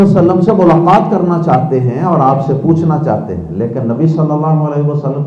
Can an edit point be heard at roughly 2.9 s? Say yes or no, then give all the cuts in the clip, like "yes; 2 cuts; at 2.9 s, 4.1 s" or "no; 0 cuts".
no; 0 cuts